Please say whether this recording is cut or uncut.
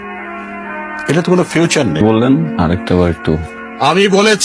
cut